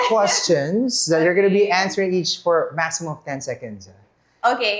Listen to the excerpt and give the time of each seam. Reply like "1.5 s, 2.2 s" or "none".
none